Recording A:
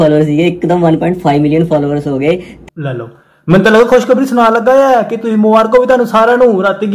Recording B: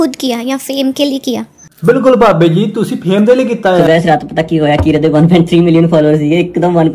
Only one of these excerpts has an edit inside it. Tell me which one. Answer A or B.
B